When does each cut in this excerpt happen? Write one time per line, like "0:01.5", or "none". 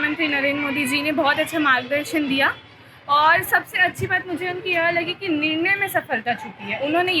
none

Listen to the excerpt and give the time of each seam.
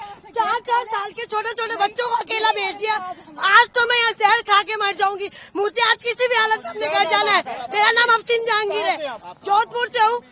none

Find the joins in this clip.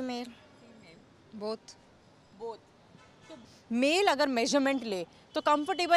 0:03.5

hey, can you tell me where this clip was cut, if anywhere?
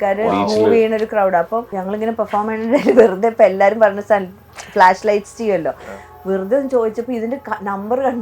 0:01.7

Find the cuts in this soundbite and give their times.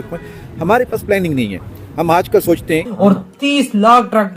0:02.9

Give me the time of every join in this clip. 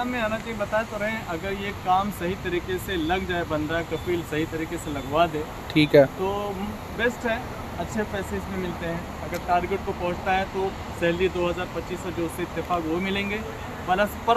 none

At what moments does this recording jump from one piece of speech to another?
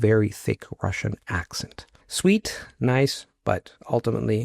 none

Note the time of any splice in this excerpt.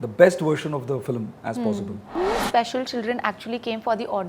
0:02.2

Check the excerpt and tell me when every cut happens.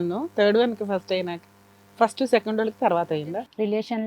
0:03.2

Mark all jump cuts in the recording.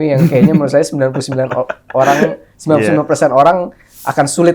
none

